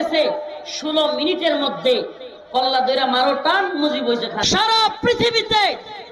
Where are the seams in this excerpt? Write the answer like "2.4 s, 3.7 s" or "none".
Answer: 4.4 s